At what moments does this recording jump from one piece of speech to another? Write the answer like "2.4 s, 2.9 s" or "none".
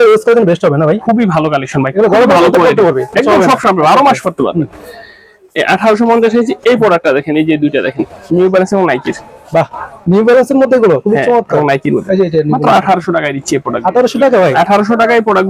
none